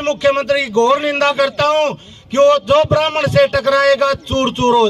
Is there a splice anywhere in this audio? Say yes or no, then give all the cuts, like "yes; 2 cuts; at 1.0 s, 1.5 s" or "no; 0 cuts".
no; 0 cuts